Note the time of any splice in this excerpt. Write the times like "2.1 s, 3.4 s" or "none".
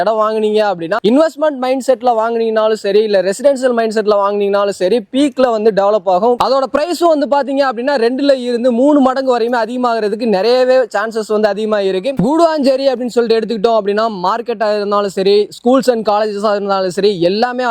none